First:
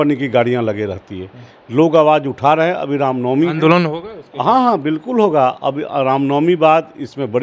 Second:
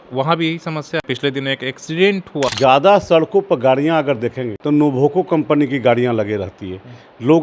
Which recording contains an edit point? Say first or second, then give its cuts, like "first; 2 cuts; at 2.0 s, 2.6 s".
second; 3 cuts; at 1.1 s, 2.5 s, 4.5 s